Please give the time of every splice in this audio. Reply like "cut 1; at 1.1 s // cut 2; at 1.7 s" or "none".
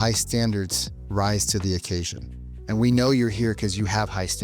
none